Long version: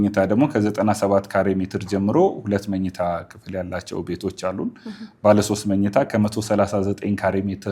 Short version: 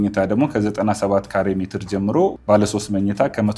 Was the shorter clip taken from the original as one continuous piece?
no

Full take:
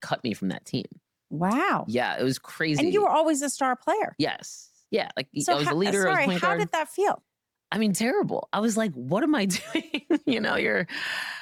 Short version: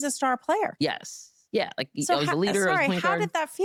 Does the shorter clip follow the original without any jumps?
yes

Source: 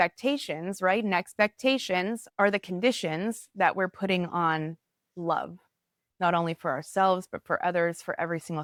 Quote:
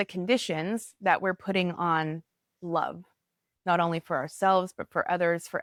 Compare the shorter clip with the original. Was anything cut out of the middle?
no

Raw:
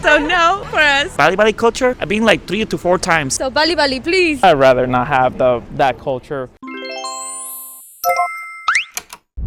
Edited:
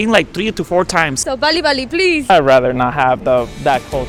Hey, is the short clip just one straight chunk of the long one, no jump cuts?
yes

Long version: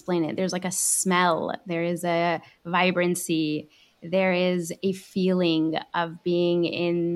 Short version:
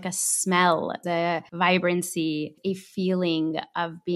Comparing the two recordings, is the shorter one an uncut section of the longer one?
no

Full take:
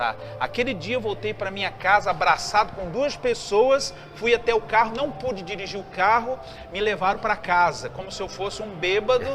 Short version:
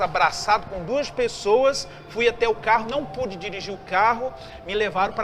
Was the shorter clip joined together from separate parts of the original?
no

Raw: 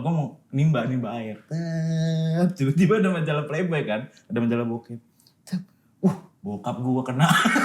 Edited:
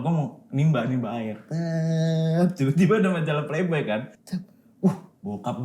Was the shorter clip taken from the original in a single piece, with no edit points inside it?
no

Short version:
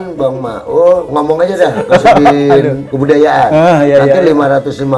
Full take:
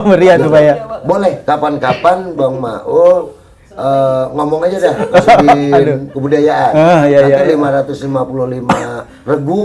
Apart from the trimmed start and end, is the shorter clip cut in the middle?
yes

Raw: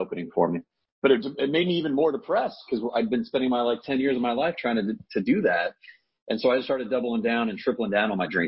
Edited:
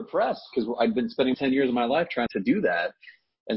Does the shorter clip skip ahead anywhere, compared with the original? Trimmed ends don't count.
yes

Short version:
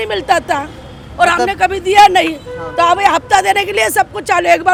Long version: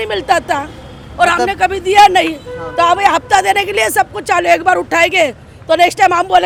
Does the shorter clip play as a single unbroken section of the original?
yes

